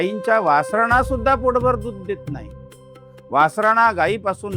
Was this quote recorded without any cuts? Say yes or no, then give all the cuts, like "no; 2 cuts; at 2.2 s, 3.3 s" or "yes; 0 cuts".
yes; 0 cuts